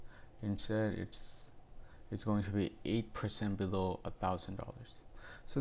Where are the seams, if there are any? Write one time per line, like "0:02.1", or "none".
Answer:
none